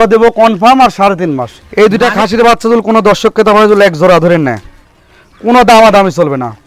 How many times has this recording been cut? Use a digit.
1